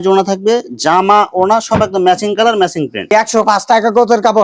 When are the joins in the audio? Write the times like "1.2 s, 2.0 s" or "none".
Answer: 3.1 s